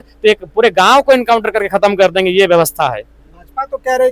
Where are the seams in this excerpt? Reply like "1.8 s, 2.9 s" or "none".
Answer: none

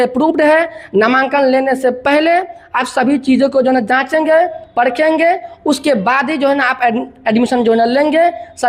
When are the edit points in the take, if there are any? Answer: none

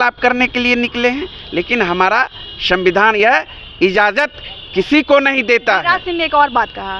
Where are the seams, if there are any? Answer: none

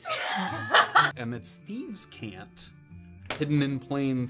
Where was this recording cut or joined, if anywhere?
1.1 s

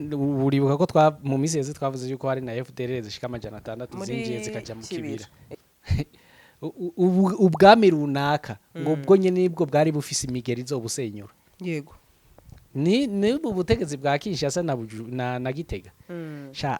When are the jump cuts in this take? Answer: 5.4 s

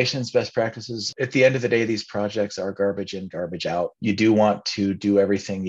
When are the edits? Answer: 1.1 s, 4.0 s

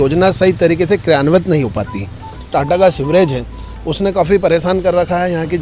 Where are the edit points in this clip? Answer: 2.4 s

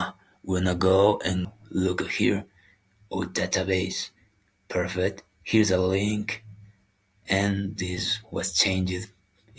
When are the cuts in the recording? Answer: 1.5 s

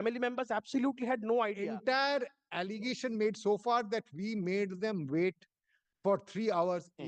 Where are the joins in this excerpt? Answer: 1.6 s

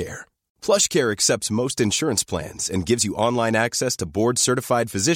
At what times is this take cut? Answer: none

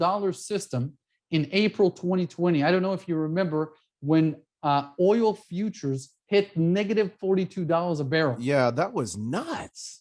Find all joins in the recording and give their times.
none

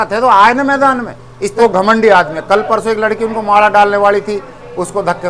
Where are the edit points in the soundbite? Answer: 1.6 s

